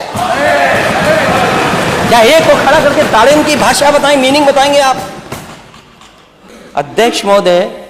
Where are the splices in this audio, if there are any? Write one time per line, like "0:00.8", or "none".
0:06.5

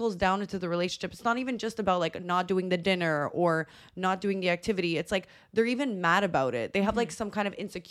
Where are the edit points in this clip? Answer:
none

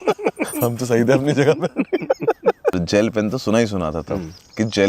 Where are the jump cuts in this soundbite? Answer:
0:02.8

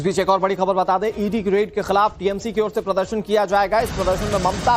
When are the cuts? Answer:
0:01.0

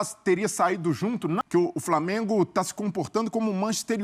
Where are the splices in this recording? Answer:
0:01.4

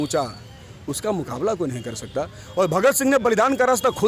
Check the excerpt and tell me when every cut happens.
none

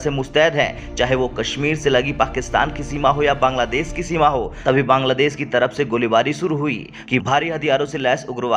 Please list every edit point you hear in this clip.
0:04.5
0:06.9

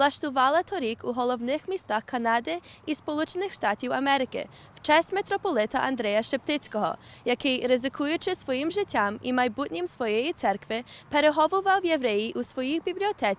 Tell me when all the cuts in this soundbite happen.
0:06.4

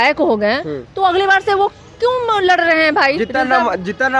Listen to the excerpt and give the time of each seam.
none

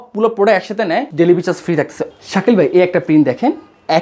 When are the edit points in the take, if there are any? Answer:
0:01.1
0:02.0

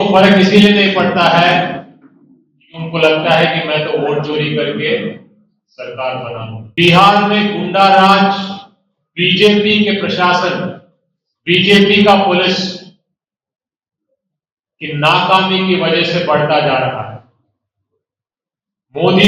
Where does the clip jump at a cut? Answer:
0:06.6

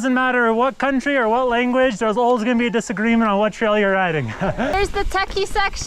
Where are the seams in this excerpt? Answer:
0:04.7

